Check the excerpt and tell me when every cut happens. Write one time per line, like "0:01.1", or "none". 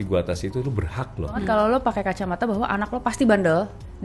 0:01.4